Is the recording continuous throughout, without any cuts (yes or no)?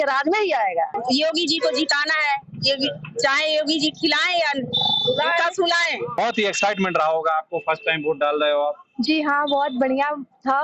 no